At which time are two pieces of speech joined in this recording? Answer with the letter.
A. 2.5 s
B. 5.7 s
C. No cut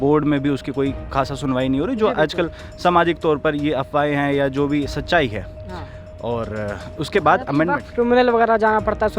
C